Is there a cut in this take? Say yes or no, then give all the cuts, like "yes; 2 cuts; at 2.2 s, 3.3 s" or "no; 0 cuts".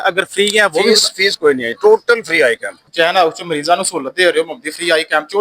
yes; 1 cut; at 2.9 s